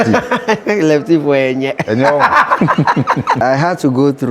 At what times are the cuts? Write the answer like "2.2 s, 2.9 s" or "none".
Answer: 3.4 s

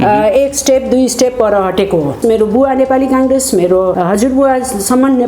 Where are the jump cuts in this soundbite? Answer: 2.2 s, 4.0 s

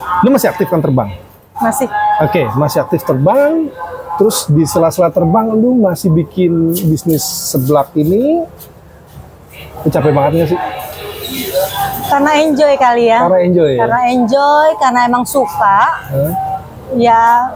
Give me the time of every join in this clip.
none

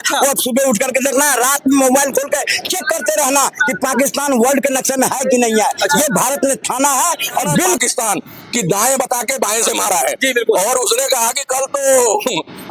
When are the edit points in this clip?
7.8 s

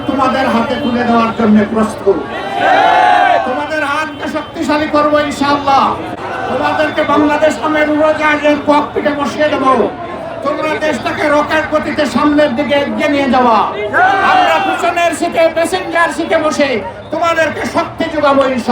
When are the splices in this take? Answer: none

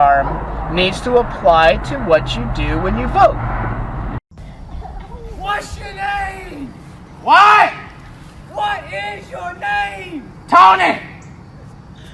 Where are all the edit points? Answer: 4.2 s

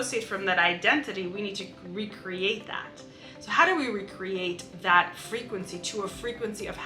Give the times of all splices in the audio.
none

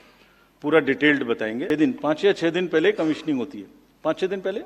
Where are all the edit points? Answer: 1.6 s

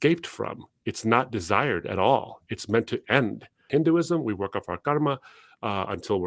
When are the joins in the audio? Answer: 3.7 s

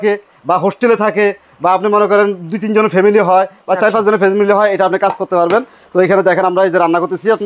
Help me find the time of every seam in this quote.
none

